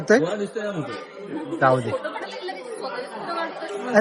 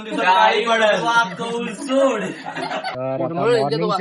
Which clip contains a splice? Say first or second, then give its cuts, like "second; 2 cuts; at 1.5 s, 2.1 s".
second; 1 cut; at 2.9 s